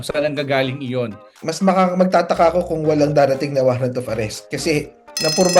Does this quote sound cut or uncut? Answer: cut